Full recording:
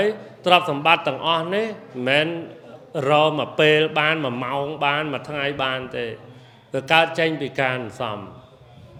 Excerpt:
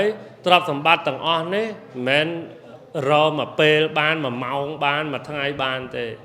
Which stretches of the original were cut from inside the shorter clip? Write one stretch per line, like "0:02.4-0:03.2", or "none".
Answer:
none